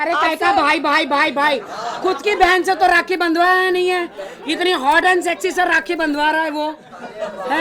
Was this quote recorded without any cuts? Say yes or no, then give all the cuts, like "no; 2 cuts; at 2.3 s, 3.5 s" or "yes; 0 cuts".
yes; 0 cuts